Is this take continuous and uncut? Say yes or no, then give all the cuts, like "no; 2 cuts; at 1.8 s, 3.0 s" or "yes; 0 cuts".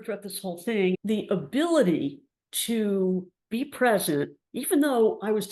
no; 1 cut; at 1.0 s